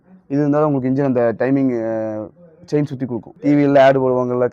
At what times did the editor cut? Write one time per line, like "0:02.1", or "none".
0:03.3